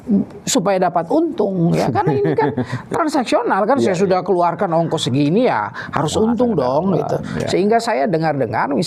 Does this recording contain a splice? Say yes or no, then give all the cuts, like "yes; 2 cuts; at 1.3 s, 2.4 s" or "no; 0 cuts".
no; 0 cuts